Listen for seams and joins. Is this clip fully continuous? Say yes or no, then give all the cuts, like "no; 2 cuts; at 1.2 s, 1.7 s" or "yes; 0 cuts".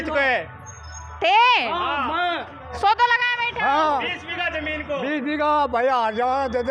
yes; 0 cuts